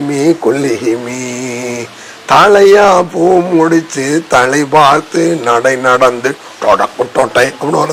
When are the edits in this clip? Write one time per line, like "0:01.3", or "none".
none